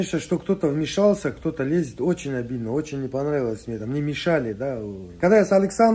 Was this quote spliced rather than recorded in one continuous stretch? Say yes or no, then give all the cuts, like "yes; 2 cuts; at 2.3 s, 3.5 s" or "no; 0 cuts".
yes; 1 cut; at 5.0 s